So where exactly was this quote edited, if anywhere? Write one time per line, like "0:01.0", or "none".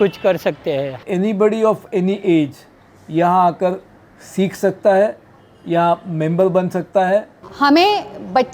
0:01.0
0:07.4